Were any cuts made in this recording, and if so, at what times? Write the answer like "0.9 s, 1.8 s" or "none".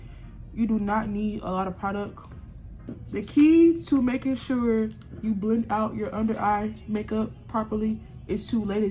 3.0 s